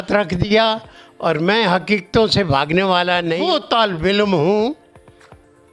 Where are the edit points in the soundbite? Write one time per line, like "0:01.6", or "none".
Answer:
0:03.4